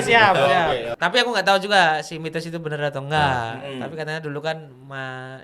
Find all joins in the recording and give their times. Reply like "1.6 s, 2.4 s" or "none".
0.9 s

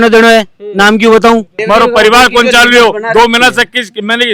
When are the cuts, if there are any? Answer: 1.6 s

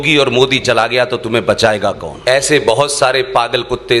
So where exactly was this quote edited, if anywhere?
2.1 s

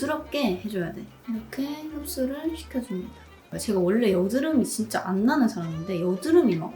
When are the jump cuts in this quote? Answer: 1.1 s, 3.5 s

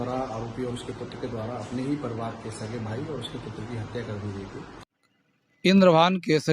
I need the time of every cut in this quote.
4.9 s

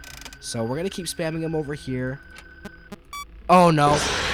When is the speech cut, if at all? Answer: none

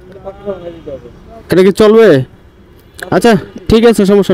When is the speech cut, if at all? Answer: none

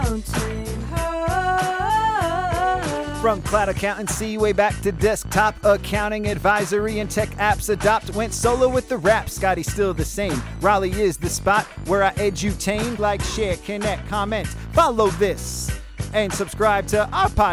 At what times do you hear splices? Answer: 13.0 s

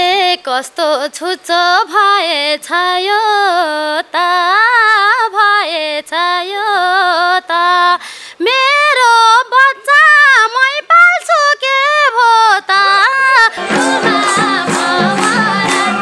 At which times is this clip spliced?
none

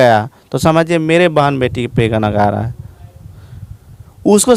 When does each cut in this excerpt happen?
none

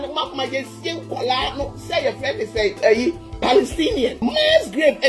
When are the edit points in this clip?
4.2 s

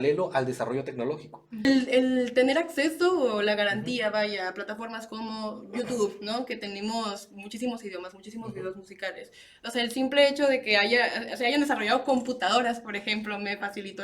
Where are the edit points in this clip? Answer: 1.6 s

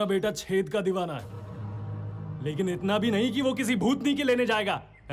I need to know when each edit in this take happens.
none

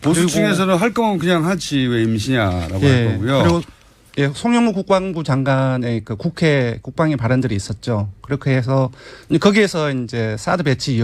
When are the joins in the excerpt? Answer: 7.1 s

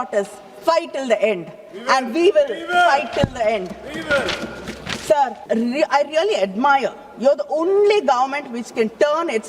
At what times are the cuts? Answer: 5.4 s

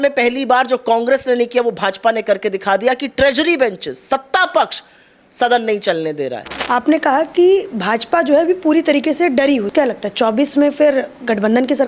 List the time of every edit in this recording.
6.6 s, 9.7 s

